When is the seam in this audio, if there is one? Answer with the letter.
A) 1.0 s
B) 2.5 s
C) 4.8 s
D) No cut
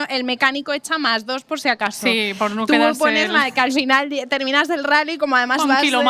D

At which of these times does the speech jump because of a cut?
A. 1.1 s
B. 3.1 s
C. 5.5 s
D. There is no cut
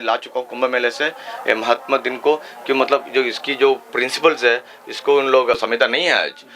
C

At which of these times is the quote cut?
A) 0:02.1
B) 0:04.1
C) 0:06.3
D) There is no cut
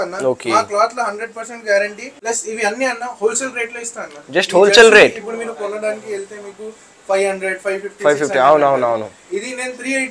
A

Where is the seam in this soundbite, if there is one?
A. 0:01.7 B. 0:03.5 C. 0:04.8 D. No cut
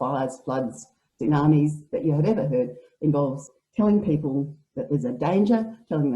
B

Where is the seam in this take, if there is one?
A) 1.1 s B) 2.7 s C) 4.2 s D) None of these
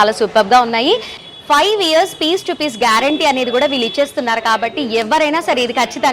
A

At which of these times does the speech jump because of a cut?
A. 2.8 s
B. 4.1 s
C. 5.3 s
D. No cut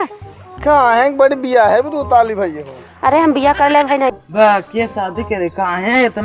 B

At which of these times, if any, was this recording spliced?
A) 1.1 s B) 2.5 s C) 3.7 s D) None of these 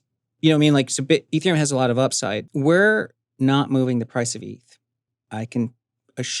B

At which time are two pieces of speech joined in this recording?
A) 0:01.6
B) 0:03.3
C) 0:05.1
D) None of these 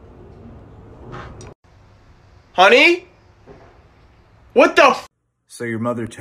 C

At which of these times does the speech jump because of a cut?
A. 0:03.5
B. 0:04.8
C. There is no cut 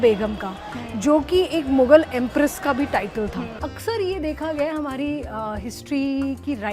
A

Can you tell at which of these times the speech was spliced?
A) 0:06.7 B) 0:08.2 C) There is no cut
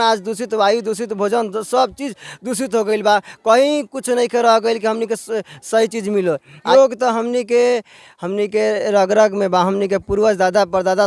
A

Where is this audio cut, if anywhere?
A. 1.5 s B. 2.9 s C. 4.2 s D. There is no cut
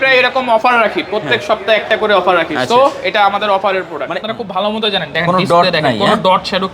C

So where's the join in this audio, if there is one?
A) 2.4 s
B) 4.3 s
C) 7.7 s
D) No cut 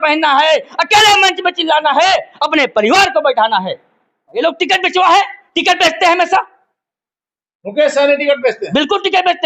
B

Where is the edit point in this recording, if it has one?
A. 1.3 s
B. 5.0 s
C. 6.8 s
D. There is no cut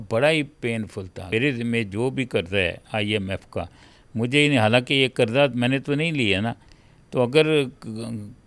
A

